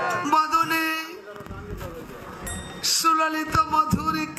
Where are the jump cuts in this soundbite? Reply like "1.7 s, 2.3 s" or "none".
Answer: none